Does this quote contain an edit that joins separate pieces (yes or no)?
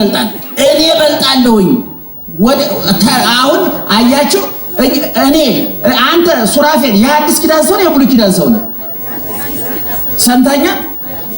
no